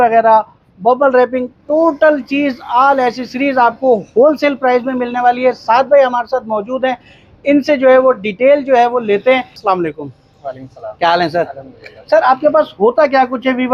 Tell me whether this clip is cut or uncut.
uncut